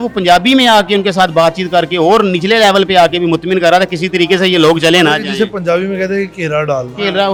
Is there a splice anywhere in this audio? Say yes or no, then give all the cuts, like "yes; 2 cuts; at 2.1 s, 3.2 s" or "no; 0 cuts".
no; 0 cuts